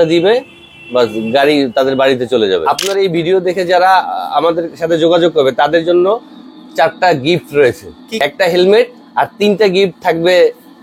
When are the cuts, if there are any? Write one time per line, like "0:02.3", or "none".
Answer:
0:02.8
0:08.2